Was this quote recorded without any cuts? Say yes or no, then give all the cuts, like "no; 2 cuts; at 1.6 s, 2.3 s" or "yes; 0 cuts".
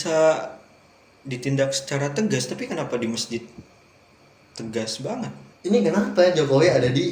no; 1 cut; at 5.4 s